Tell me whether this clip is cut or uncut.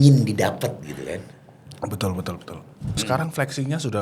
cut